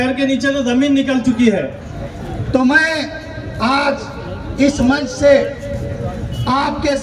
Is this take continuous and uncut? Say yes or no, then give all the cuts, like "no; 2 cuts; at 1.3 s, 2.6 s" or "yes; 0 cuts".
no; 1 cut; at 1.8 s